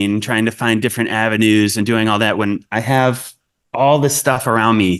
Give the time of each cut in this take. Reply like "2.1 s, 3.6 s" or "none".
none